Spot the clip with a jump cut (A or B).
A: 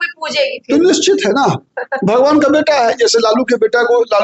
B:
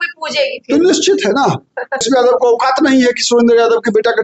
B